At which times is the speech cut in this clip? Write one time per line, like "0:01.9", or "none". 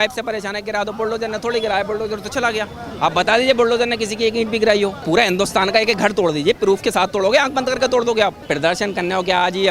0:05.0
0:08.4